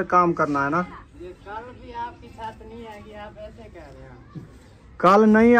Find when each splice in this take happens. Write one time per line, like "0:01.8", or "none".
0:01.0